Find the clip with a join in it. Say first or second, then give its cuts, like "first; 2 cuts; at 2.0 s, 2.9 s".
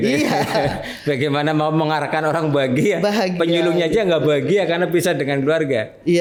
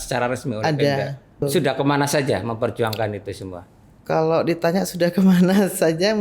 second; 1 cut; at 1.4 s